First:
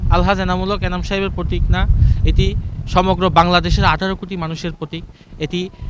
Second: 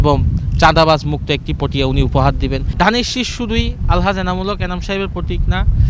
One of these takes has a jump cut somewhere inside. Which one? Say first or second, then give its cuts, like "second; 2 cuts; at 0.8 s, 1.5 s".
second; 1 cut; at 2.6 s